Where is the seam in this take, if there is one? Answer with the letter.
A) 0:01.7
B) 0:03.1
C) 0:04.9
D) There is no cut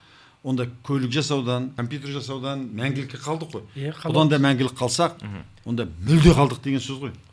A